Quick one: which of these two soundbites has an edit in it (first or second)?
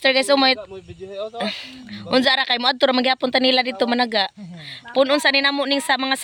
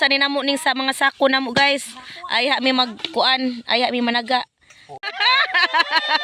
second